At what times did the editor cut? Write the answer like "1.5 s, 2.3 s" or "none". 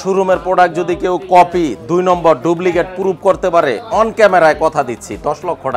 none